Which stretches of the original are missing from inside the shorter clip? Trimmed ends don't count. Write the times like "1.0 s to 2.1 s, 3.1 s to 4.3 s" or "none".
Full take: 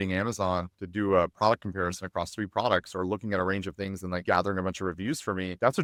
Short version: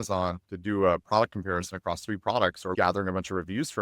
3.0 s to 4.2 s